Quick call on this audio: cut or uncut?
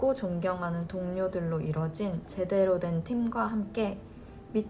uncut